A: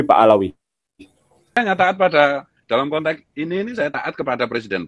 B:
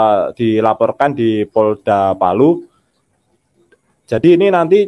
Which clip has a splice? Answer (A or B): A